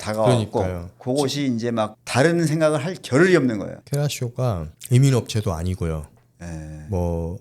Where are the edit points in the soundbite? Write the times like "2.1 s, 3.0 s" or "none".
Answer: 3.8 s, 4.7 s